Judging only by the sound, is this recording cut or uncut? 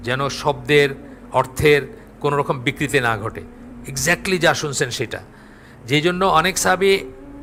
uncut